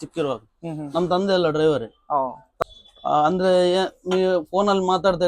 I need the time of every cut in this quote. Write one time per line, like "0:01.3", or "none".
0:02.5